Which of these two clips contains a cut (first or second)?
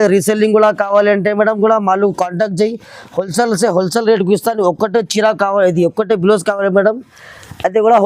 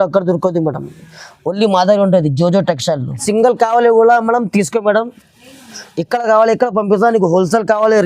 second